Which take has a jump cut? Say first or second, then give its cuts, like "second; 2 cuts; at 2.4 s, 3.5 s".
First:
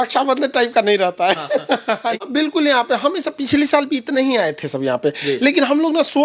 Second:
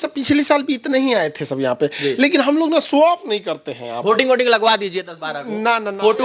first; 1 cut; at 2.2 s